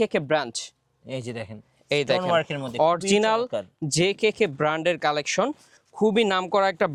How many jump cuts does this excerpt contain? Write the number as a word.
zero